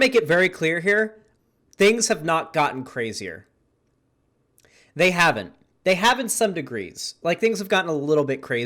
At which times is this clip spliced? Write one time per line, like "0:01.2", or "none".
0:01.3